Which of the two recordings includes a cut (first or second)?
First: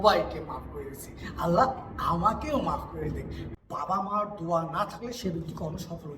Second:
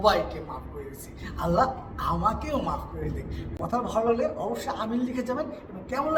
first